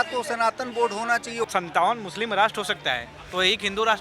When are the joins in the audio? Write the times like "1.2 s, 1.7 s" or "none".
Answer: 1.4 s